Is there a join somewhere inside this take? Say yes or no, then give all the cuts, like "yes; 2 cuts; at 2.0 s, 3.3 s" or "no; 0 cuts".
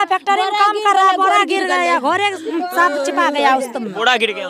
no; 0 cuts